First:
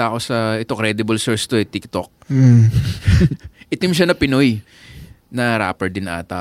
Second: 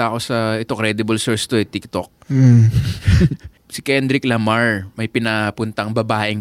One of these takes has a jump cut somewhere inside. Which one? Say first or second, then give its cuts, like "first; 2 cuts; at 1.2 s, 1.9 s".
second; 1 cut; at 3.5 s